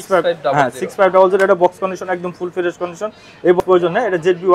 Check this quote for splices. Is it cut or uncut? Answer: cut